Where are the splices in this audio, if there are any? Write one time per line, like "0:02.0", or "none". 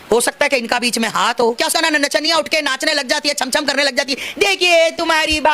0:01.6